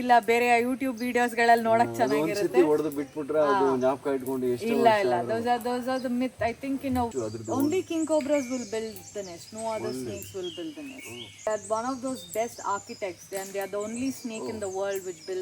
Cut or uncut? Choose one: cut